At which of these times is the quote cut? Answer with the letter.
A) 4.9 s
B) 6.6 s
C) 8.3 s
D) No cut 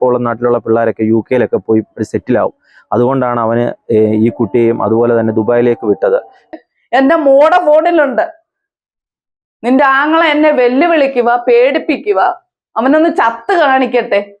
B